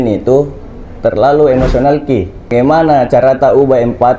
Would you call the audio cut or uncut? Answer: cut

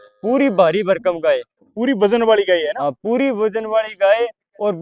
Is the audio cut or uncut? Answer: uncut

